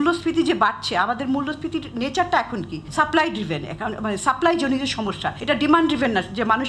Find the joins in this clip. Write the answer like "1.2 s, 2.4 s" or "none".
2.8 s, 5.3 s